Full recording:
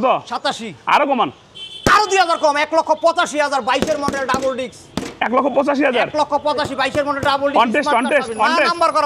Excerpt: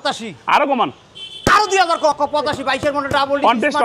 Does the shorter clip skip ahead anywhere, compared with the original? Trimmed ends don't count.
yes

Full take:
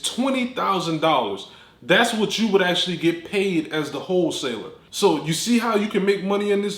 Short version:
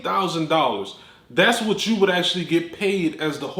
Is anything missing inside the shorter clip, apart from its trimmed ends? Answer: no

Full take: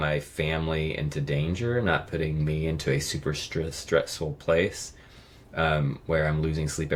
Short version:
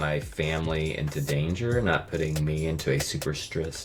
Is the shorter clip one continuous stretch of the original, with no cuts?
yes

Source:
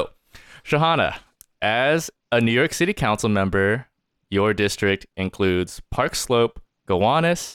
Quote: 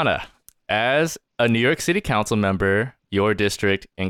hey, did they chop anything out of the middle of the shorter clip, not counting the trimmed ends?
yes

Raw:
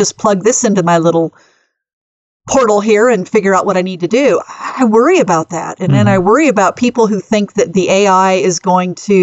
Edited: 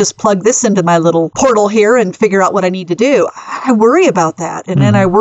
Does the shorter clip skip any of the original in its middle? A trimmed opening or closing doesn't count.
yes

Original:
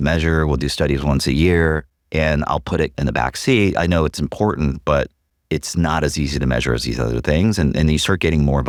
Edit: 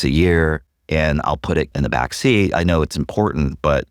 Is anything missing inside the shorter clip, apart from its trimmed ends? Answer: no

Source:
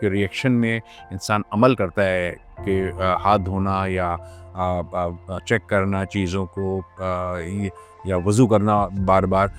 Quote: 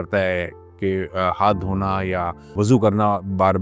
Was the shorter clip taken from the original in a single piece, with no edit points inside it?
no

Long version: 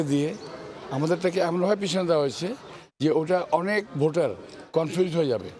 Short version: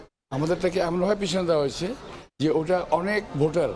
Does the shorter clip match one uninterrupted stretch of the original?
yes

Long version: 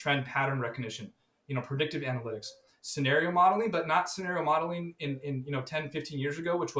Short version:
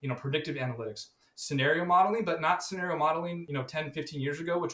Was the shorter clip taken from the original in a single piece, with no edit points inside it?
no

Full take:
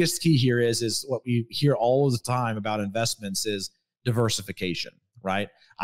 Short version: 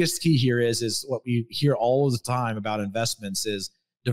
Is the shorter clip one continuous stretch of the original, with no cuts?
yes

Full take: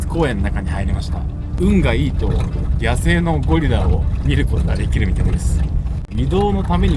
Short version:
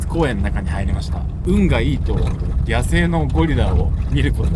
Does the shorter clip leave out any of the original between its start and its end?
yes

